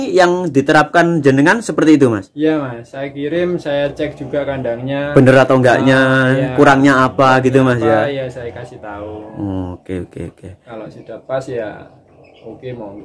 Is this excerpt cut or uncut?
uncut